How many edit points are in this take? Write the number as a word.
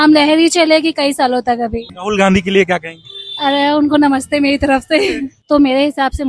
two